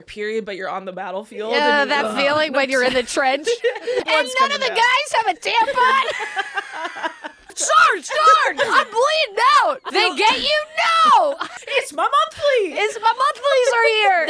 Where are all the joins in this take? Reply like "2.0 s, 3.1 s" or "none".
4.1 s, 7.5 s, 9.9 s, 11.5 s

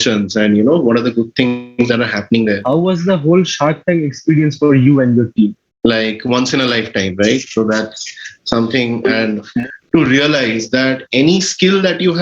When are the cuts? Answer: 2.6 s, 5.7 s, 9.5 s

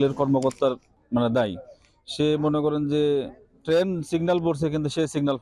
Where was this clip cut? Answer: 0.9 s

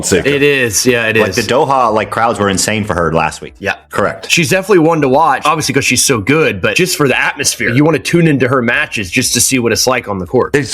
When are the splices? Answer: 3.6 s

